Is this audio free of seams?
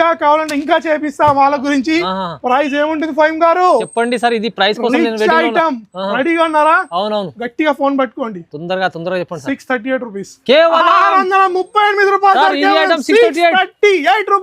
yes; 0 cuts

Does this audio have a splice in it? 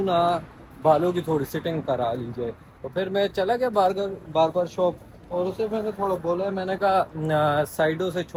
no; 0 cuts

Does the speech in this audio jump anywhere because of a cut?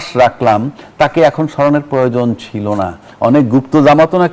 yes; 1 cut; at 3.0 s

